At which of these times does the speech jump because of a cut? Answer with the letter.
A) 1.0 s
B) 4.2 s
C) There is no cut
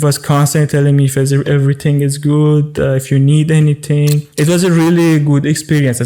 B